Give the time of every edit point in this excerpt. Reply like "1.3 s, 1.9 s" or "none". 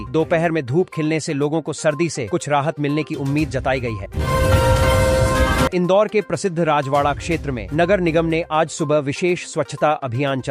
4.1 s, 5.7 s